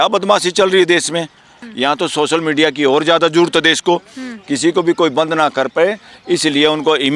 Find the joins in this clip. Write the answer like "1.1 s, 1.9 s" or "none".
1.5 s